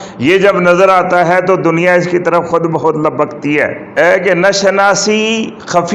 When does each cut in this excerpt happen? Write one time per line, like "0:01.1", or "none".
0:03.9